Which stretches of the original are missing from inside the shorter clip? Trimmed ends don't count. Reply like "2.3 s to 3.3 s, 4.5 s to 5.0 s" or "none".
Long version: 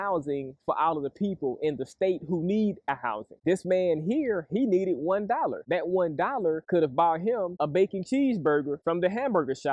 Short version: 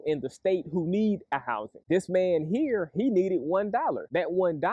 none